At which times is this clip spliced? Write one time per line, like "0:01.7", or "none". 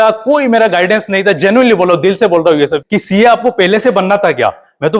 0:02.8